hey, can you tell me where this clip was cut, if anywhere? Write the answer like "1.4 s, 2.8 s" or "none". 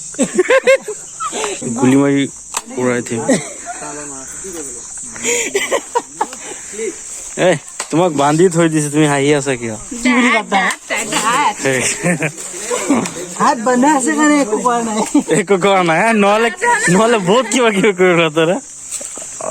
1.6 s